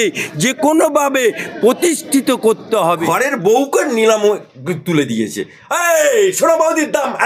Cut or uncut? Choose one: cut